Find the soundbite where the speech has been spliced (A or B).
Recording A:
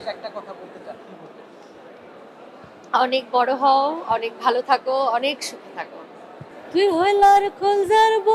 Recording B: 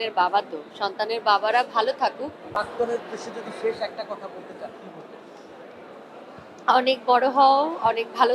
B